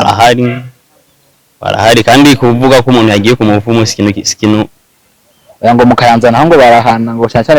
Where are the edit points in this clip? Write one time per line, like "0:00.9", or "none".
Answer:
none